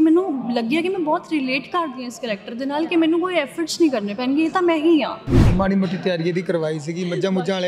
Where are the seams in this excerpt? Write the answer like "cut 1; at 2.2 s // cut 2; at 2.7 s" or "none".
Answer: cut 1; at 5.5 s